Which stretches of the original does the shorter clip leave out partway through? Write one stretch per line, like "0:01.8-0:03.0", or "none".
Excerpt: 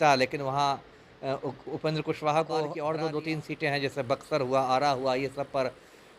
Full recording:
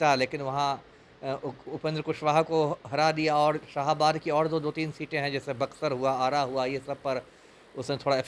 0:02.7-0:04.2